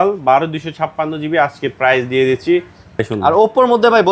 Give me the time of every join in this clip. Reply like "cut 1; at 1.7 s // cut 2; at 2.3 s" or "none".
cut 1; at 3.0 s